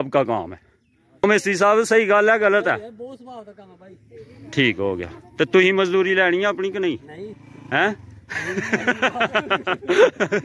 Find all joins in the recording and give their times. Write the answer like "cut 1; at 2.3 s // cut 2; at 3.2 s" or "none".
cut 1; at 1.2 s